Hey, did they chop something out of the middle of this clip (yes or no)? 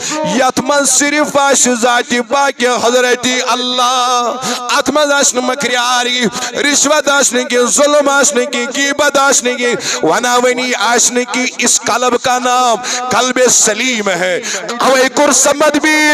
yes